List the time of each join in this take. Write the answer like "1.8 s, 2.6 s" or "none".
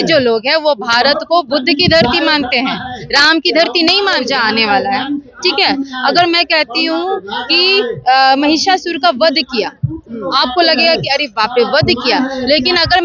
4.2 s